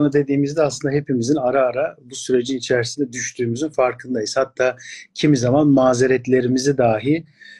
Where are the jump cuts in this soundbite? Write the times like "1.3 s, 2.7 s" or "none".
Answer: none